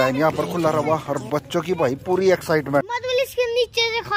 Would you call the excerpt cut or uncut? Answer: cut